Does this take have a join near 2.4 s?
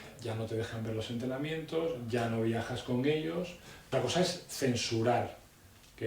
no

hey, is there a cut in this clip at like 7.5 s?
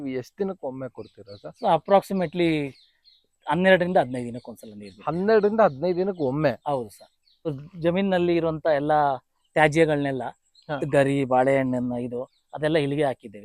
yes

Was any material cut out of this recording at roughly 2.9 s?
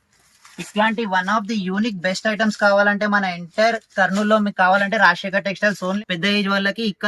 no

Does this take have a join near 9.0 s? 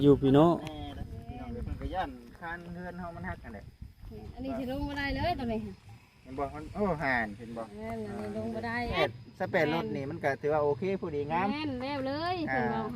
yes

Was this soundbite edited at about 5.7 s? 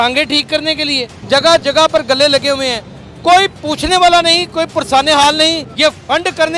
yes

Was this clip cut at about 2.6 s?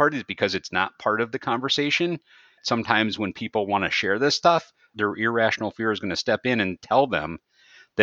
yes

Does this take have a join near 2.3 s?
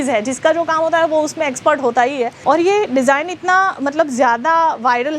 yes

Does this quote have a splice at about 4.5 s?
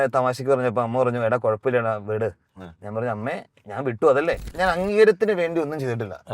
yes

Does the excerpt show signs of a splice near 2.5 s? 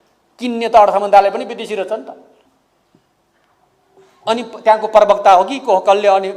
yes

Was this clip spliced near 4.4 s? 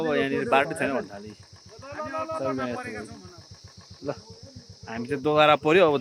no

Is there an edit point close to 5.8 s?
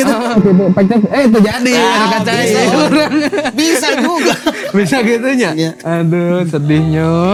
no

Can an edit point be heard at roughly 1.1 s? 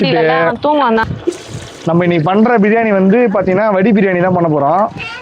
yes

